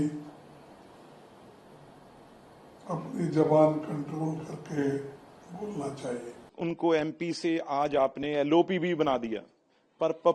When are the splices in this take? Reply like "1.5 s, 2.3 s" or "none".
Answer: 6.5 s